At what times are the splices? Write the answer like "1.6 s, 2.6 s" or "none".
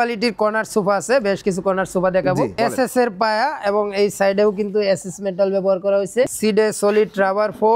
2.5 s, 6.3 s